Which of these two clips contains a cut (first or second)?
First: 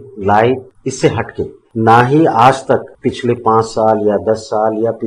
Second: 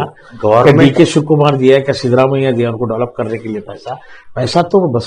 first